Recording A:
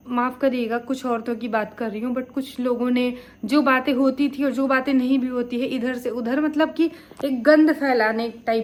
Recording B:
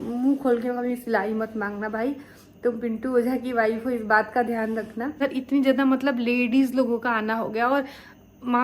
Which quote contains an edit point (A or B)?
B